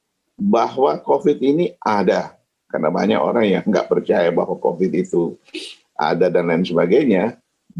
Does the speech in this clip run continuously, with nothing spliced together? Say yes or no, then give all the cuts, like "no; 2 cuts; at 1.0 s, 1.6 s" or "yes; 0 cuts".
yes; 0 cuts